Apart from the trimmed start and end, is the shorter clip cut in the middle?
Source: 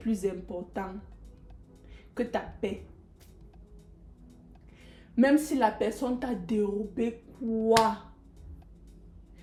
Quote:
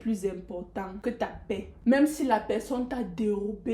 yes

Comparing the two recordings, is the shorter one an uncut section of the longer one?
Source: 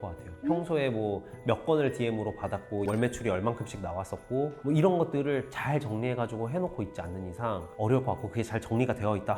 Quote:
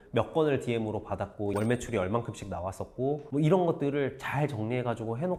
yes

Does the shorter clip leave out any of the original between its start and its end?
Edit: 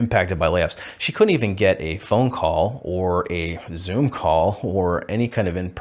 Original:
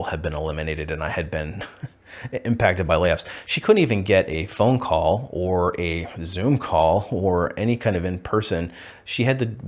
no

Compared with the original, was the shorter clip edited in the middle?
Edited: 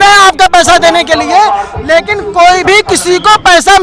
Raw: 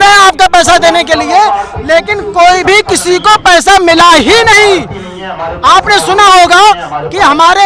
no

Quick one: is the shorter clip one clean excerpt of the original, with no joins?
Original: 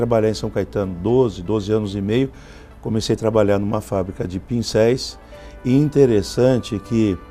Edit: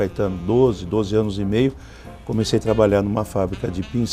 yes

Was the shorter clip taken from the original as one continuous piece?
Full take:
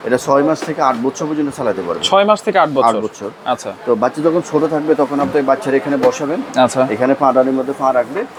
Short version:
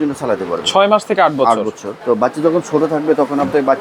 no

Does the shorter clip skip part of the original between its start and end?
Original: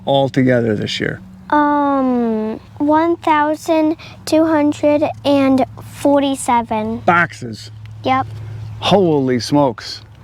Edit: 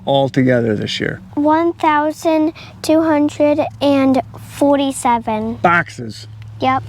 yes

